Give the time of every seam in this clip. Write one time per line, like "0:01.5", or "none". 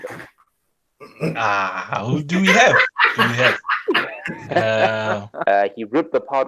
0:05.3